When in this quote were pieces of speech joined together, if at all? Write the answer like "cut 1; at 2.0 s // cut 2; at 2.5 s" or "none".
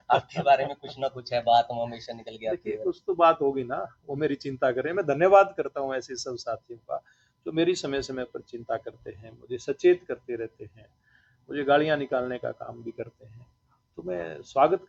none